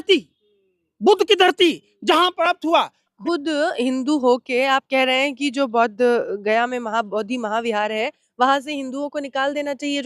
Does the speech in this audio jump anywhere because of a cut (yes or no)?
yes